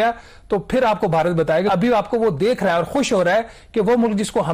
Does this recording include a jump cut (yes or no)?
yes